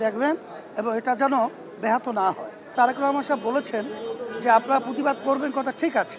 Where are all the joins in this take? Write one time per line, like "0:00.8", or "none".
0:02.7